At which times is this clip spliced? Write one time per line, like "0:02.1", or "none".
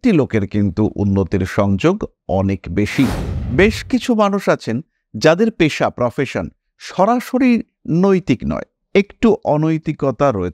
0:03.3